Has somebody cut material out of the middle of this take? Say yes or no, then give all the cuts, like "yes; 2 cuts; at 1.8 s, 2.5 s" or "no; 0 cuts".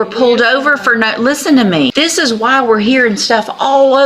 yes; 1 cut; at 1.9 s